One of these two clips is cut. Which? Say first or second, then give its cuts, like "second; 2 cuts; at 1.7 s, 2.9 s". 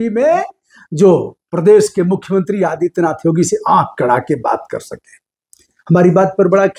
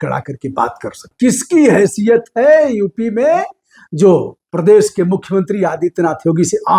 second; 1 cut; at 1.0 s